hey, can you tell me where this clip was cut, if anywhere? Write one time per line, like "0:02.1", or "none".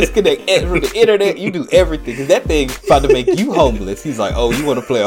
0:02.7